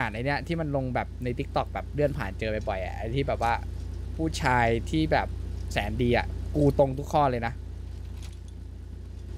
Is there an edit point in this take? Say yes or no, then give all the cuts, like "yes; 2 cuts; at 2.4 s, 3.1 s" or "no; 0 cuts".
no; 0 cuts